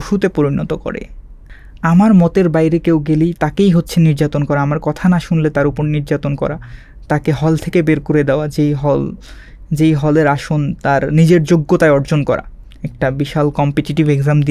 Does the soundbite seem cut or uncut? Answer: cut